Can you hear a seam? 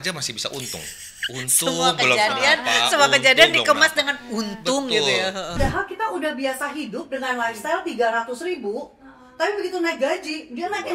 yes; 1 cut; at 5.6 s

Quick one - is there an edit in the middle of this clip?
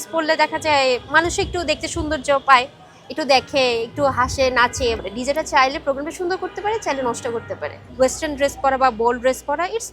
yes; 2 cuts; at 5.0 s, 7.8 s

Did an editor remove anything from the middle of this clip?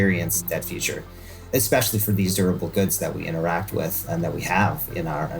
yes; 1 cut; at 1.5 s

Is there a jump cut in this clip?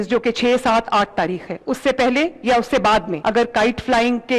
yes; 1 cut; at 3.1 s

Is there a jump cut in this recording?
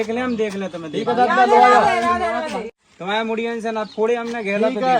yes; 1 cut; at 2.6 s

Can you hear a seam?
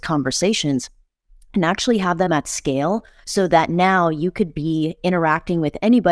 no; 0 cuts

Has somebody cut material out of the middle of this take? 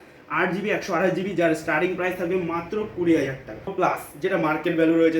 yes; 1 cut; at 3.7 s

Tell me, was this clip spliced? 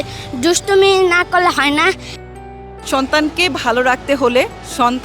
yes; 1 cut; at 2.4 s

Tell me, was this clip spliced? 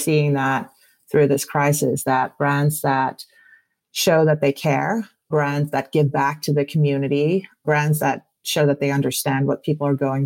no; 0 cuts

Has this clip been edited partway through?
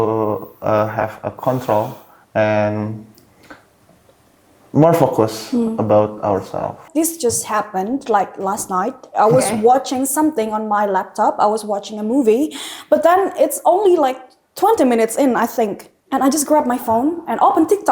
yes; 1 cut; at 6.8 s

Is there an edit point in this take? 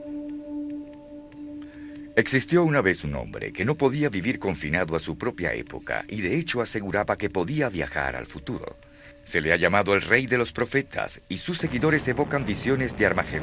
yes; 1 cut; at 8.8 s

